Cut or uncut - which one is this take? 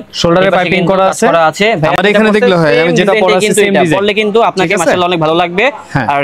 uncut